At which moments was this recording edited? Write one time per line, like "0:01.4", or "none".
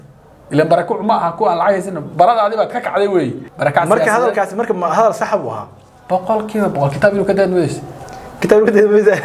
0:03.4